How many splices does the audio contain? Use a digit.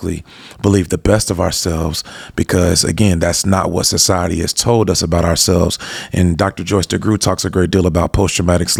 0